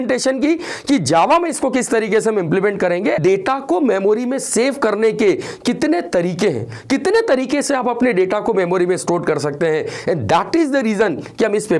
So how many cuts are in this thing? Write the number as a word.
one